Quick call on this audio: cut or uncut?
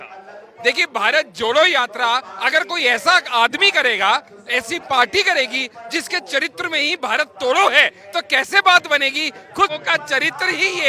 uncut